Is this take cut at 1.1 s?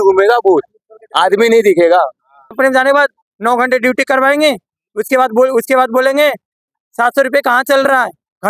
no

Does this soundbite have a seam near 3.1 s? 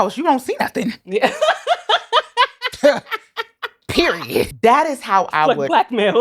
no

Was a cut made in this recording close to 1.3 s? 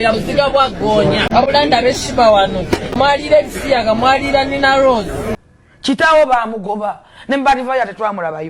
yes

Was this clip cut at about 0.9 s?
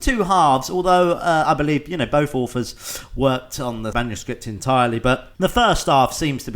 no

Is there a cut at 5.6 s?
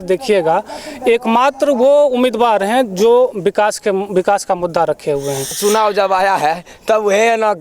yes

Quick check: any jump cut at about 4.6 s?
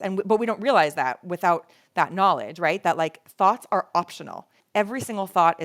yes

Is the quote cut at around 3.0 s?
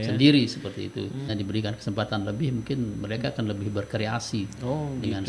no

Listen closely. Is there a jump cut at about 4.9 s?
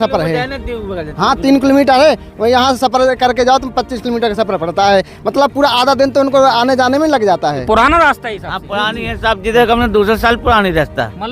no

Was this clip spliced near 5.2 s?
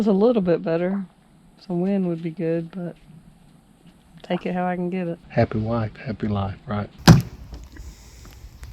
yes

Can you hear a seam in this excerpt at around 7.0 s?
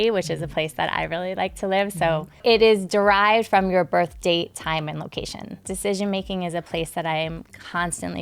no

